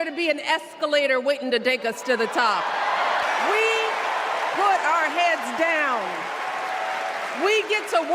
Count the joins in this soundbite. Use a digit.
0